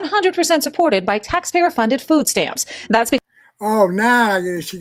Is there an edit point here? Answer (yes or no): no